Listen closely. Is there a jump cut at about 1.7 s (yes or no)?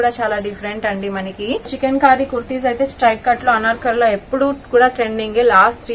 yes